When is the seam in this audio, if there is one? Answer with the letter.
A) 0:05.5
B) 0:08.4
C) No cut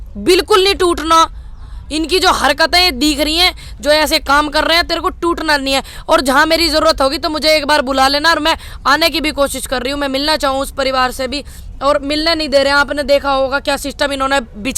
C